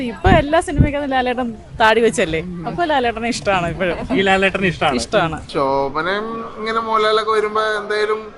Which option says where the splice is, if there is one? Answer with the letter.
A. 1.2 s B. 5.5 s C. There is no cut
B